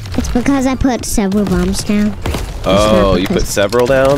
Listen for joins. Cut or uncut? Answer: uncut